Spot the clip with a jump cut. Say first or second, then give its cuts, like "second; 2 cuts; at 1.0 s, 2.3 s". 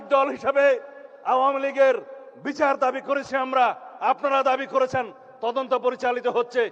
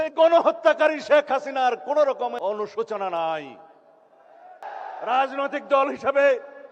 second; 2 cuts; at 2.3 s, 4.6 s